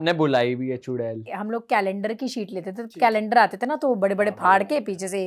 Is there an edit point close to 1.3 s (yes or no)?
yes